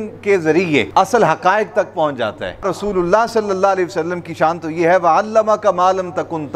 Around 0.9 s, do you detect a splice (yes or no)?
yes